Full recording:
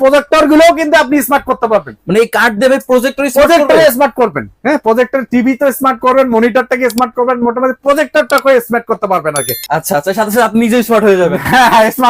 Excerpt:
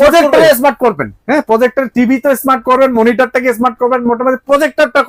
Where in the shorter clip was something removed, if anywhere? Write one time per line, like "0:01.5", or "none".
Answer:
none